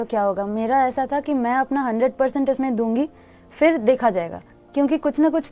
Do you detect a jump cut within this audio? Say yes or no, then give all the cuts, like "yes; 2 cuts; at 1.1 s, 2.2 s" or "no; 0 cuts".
no; 0 cuts